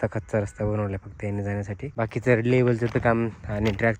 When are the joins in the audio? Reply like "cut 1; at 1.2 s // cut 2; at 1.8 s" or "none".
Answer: cut 1; at 1.9 s